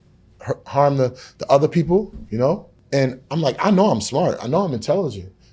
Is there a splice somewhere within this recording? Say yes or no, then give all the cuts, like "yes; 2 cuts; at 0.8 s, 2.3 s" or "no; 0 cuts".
yes; 1 cut; at 2.7 s